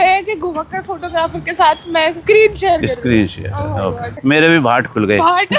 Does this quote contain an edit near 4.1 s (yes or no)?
yes